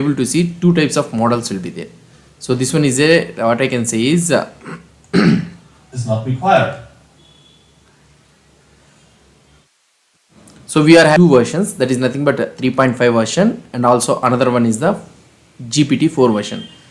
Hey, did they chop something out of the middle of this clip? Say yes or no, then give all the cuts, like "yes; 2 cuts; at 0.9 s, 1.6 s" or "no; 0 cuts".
yes; 1 cut; at 11.1 s